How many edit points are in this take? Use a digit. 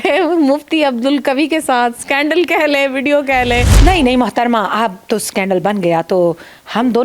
1